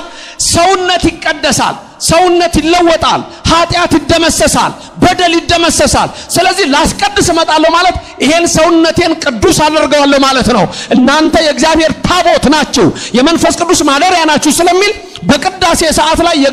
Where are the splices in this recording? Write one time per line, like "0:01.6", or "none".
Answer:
none